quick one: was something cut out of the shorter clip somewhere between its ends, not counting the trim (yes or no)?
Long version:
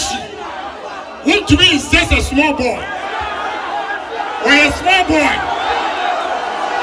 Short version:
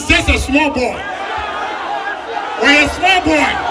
no